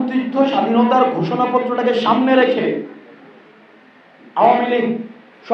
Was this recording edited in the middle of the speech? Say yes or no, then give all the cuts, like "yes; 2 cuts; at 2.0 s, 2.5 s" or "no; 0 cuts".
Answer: no; 0 cuts